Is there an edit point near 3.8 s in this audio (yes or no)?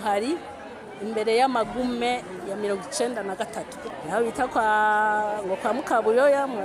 yes